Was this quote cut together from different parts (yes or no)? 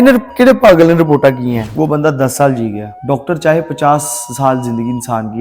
yes